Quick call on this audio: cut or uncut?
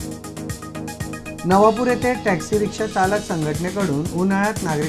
cut